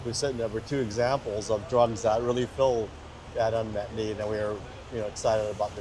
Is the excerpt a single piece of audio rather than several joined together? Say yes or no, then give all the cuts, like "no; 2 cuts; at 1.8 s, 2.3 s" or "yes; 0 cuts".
yes; 0 cuts